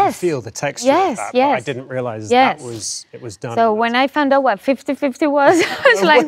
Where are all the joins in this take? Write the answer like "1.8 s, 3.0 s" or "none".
none